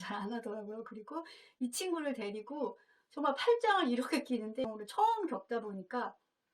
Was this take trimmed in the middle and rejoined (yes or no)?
yes